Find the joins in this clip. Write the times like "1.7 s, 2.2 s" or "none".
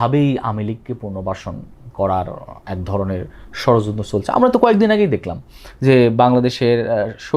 none